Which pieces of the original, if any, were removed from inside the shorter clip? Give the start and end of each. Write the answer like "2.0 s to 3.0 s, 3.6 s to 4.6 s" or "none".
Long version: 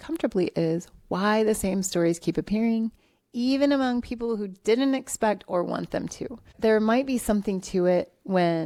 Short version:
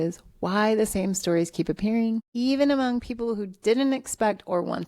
3.0 s to 3.3 s